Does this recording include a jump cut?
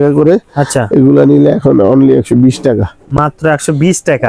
no; 0 cuts

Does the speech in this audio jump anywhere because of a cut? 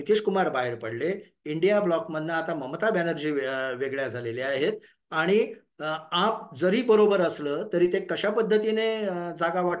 no; 0 cuts

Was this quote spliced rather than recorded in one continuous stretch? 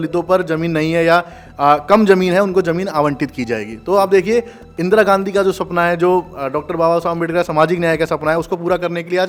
no; 0 cuts

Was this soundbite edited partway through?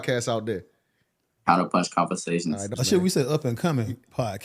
yes; 1 cut; at 2.7 s

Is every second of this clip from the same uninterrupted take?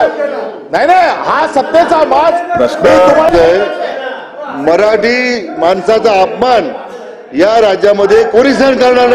no; 1 cut; at 3.3 s

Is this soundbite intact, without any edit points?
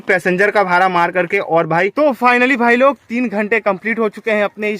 no; 1 cut; at 1.9 s

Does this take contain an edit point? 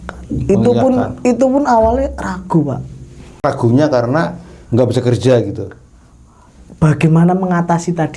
yes; 1 cut; at 3.4 s

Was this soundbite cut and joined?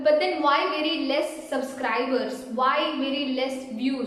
no; 0 cuts

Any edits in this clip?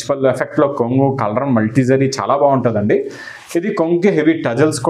no; 0 cuts

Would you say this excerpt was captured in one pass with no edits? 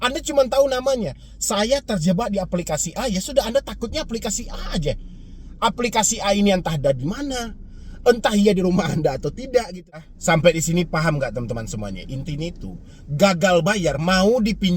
no; 1 cut; at 10.1 s

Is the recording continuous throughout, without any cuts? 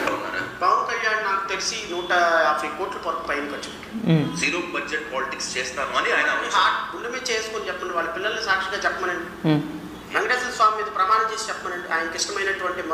yes; 0 cuts

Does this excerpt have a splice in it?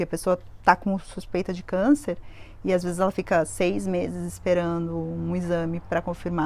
no; 0 cuts

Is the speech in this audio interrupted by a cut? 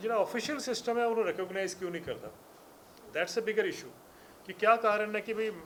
no; 0 cuts

